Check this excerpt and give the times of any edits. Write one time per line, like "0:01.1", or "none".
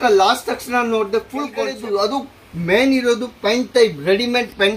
0:01.6